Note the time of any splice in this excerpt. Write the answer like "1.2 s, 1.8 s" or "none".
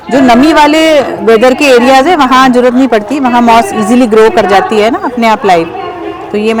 none